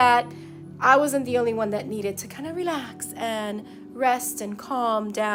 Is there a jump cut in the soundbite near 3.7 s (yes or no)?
no